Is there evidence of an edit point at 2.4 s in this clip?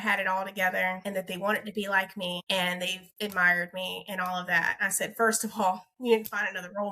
yes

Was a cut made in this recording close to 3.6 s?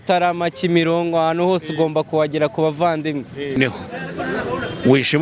yes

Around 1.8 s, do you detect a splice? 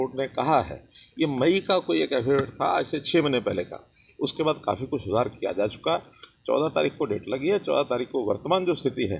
no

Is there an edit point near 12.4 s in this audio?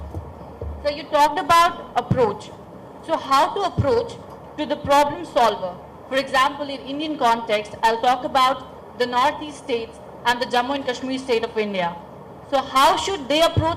yes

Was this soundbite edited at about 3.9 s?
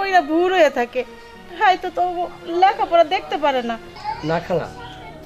yes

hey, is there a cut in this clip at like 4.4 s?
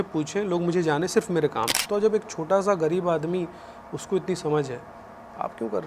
no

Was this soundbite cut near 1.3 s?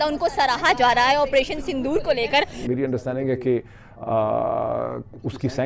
no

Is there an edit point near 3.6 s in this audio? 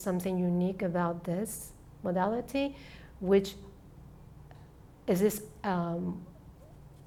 no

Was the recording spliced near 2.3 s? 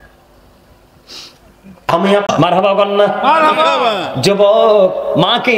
yes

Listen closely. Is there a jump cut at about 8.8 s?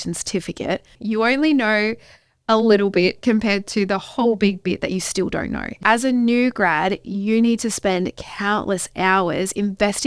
no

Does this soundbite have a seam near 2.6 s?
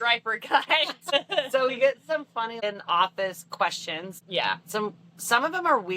yes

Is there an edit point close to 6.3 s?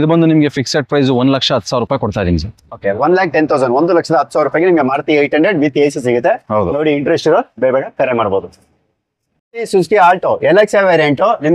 no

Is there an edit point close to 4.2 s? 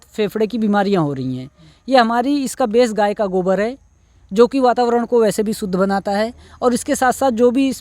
no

